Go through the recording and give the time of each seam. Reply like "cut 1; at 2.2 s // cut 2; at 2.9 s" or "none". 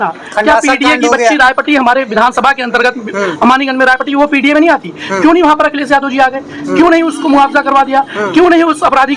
none